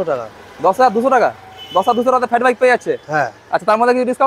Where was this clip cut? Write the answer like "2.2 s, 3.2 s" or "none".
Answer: none